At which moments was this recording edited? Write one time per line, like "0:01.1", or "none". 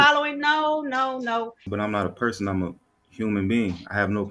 0:01.6